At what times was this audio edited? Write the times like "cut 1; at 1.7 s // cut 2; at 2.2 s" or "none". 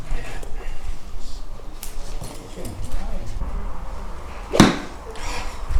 none